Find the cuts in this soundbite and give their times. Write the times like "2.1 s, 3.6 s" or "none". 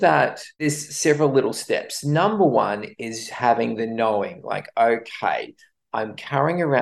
none